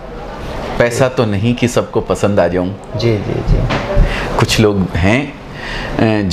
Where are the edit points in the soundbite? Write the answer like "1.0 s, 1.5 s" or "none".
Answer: none

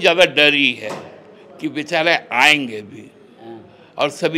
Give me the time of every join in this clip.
none

